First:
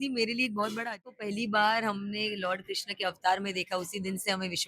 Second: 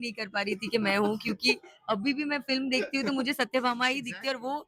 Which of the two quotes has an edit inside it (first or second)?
first